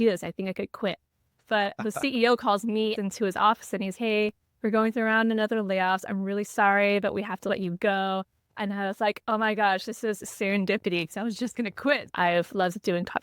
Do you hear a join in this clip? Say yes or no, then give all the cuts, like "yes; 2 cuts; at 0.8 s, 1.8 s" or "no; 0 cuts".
yes; 2 cuts; at 3.0 s, 12.1 s